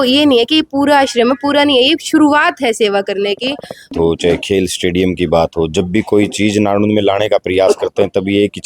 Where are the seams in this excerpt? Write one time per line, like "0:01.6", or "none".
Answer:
0:03.9